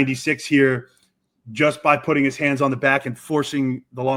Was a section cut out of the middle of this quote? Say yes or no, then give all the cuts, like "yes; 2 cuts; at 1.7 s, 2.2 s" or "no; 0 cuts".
no; 0 cuts